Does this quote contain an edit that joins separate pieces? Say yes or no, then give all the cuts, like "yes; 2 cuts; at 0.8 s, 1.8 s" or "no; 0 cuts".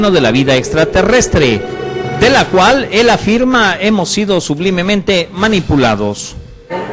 no; 0 cuts